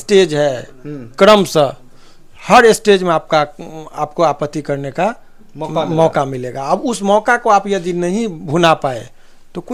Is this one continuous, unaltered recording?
yes; 0 cuts

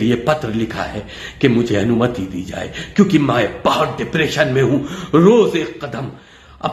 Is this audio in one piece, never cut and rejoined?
yes; 0 cuts

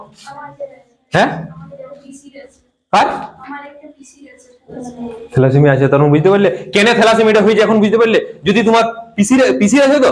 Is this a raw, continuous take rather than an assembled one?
yes; 0 cuts

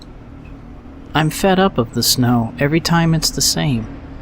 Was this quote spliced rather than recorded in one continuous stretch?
yes; 1 cut; at 1.1 s

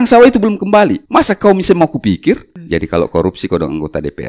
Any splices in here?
yes; 2 cuts; at 1.0 s, 2.5 s

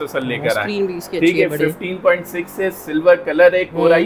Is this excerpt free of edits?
yes; 0 cuts

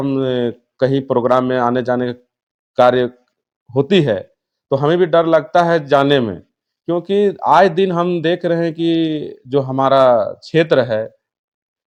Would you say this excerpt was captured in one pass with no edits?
yes; 0 cuts

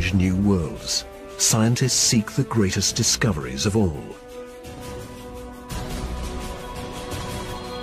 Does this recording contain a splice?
no; 0 cuts

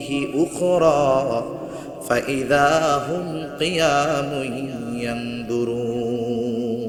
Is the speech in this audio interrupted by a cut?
no; 0 cuts

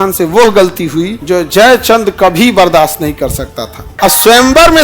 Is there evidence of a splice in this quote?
yes; 2 cuts; at 1.2 s, 3.8 s

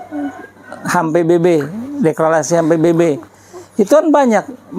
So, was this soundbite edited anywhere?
no; 0 cuts

